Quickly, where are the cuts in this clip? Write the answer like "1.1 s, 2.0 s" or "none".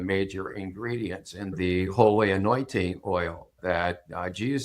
1.5 s, 3.6 s